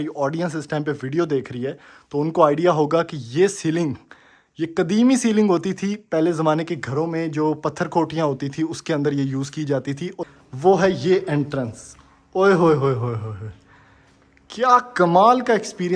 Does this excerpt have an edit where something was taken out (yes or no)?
yes